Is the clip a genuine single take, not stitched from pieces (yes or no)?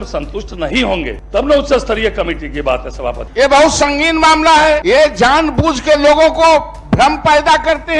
no